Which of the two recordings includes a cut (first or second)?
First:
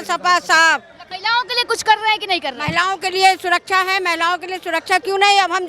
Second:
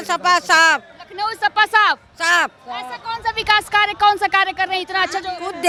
first